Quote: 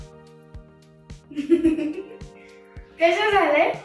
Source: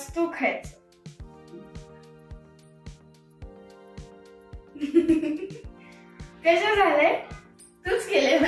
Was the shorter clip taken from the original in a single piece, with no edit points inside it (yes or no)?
no